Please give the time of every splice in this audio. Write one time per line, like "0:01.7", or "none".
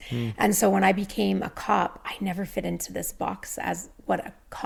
none

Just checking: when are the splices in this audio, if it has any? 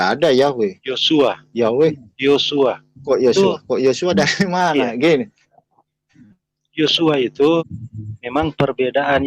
0:07.8

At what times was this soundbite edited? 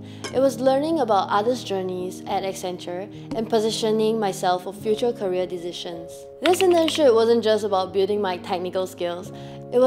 none

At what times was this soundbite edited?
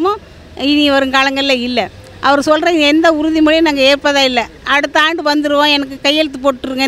none

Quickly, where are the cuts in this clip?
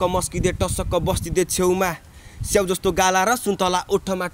none

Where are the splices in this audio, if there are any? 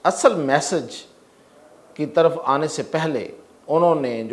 none

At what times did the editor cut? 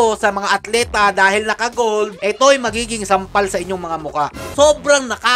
0:02.2
0:04.4

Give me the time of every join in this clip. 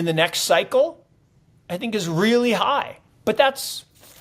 0:03.0

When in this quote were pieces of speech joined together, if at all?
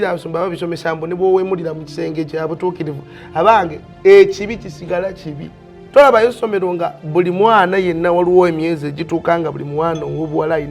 0:05.7

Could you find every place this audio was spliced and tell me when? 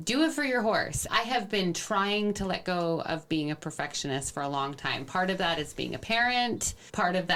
none

